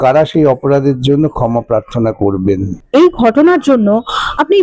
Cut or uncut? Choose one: uncut